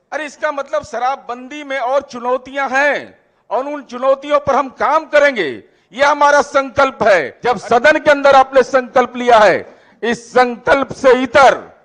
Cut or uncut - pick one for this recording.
cut